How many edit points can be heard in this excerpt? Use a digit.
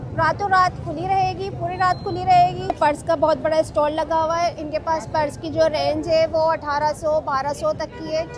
1